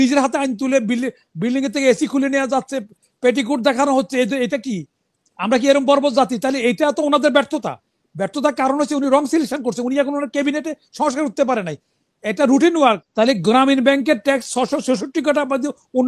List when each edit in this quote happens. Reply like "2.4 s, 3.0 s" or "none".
13.1 s